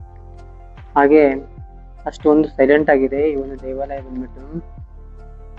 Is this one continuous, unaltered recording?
no; 1 cut; at 4.6 s

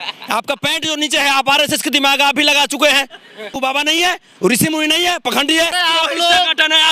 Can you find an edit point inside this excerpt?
yes; 2 cuts; at 3.5 s, 5.8 s

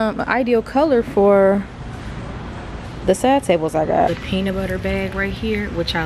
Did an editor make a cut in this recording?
yes; 1 cut; at 4.1 s

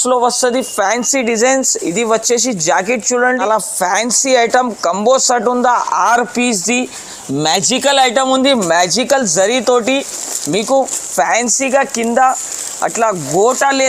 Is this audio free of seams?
no; 1 cut; at 3.4 s

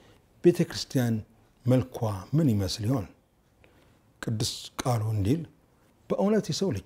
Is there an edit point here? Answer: no; 0 cuts

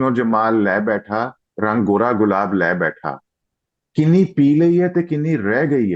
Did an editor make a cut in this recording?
no; 0 cuts

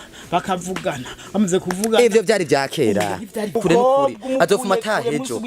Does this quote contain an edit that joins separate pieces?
yes; 1 cut; at 3.6 s

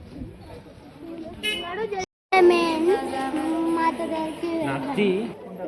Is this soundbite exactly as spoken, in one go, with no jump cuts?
no; 1 cut; at 2.1 s

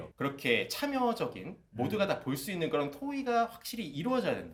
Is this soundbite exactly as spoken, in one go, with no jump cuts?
yes; 0 cuts

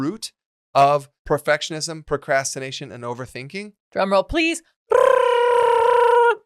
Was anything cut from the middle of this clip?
yes; 2 cuts; at 1.1 s, 3.8 s

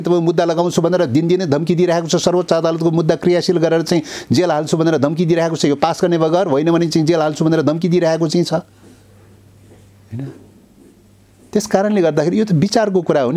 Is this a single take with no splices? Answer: yes; 0 cuts

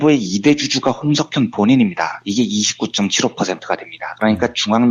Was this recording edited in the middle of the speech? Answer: no; 0 cuts

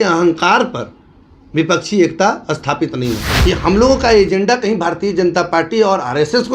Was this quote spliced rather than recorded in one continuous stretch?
yes; 1 cut; at 3.3 s

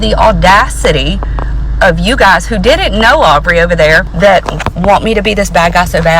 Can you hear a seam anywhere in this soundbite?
yes; 1 cut; at 4.1 s

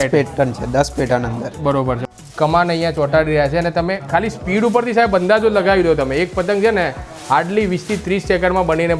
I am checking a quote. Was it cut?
yes; 1 cut; at 2.0 s

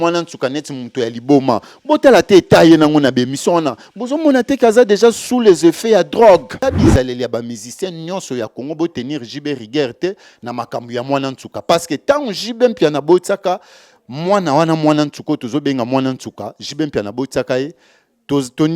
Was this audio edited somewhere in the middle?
yes; 1 cut; at 6.6 s

